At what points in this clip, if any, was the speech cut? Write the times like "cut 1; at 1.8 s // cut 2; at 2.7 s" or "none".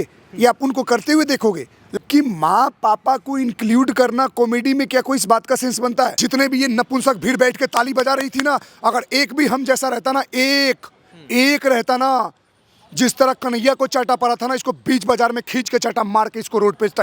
cut 1; at 1.8 s // cut 2; at 6.2 s